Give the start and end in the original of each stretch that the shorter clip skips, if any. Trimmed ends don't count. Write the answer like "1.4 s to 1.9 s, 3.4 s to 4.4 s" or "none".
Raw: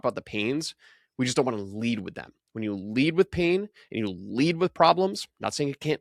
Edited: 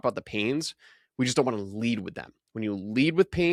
none